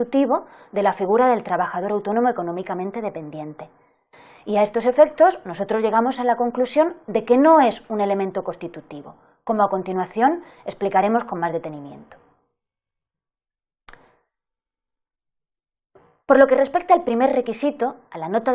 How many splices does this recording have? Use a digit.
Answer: 1